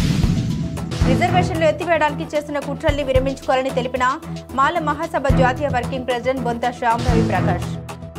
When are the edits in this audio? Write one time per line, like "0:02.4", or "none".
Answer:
0:01.0